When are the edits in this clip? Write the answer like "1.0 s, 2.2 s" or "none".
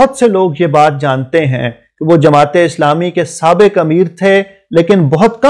none